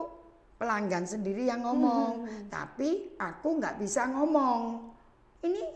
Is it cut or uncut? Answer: uncut